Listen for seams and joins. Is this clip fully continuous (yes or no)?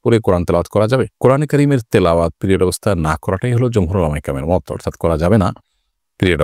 yes